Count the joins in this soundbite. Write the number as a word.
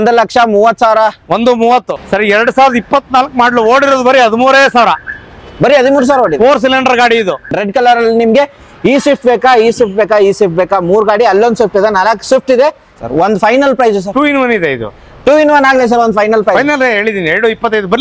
three